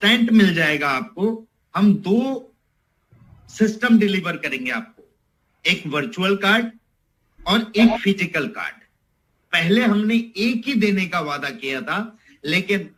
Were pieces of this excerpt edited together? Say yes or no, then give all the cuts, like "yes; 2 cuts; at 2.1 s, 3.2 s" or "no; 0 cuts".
no; 0 cuts